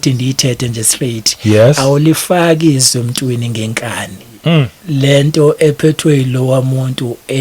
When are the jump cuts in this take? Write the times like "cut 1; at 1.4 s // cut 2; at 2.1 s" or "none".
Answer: cut 1; at 4.8 s

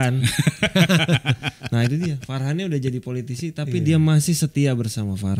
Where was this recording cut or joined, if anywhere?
none

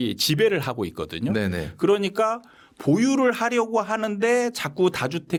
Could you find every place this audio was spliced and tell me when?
none

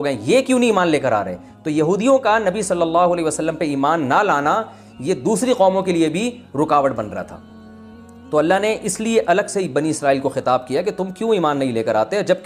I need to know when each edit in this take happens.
none

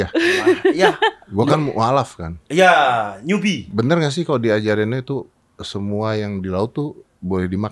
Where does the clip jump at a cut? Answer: none

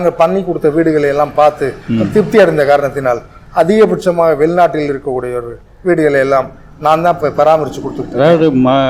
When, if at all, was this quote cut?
none

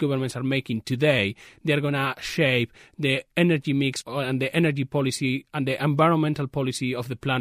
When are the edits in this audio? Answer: cut 1; at 4.0 s

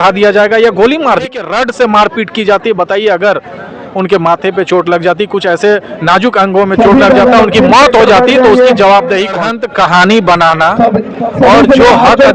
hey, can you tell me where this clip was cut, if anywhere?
cut 1; at 1.3 s // cut 2; at 9.4 s

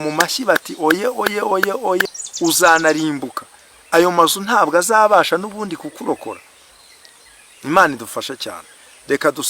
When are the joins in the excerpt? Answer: cut 1; at 2.1 s

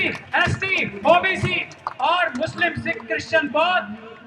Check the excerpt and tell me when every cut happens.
none

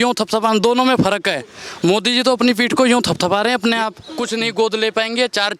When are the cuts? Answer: cut 1; at 4.1 s

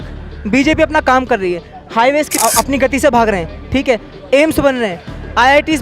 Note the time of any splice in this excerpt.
cut 1; at 2.4 s

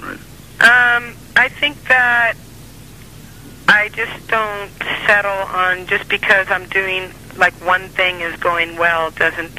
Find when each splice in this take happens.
none

